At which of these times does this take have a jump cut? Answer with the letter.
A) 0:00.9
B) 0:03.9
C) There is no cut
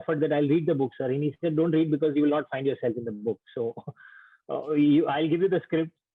C